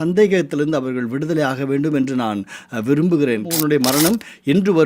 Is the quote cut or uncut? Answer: cut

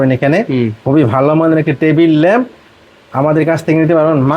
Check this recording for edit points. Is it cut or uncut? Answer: uncut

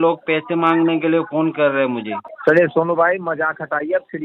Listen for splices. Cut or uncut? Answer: cut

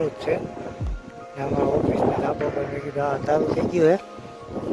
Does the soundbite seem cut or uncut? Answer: uncut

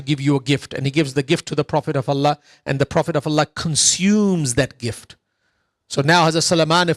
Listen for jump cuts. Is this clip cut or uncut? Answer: uncut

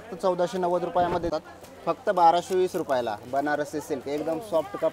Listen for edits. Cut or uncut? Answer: cut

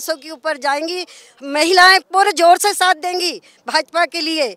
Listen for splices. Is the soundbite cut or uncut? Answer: uncut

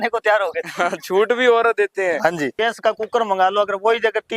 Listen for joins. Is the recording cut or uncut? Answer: cut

